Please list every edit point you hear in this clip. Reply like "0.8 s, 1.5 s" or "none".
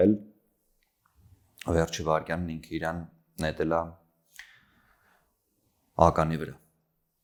none